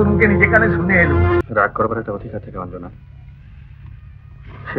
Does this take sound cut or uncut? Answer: cut